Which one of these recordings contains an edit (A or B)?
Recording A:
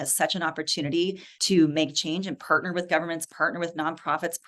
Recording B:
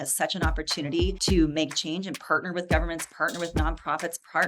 B